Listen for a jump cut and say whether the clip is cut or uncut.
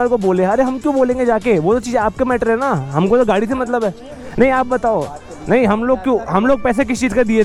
uncut